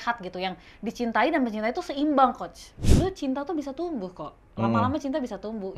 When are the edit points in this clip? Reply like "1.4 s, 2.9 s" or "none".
2.9 s